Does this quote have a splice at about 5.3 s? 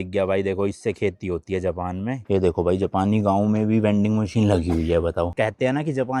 yes; 2 cuts; at 2.2 s, 5.3 s

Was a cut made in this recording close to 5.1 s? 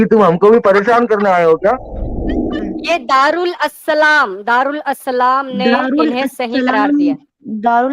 no; 1 cut; at 2.5 s

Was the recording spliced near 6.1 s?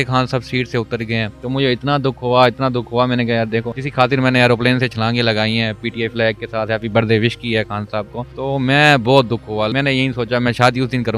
no; 4 cuts; at 1.4 s, 3.8 s, 8.2 s, 9.7 s

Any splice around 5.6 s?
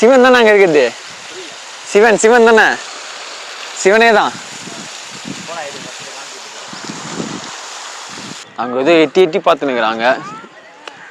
no; 1 cut; at 8.5 s

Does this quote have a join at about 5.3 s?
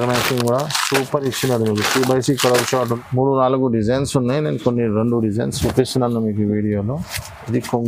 no; 1 cut; at 3.0 s

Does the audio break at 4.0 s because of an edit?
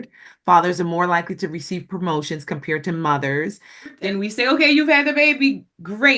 yes; 1 cut; at 4.0 s

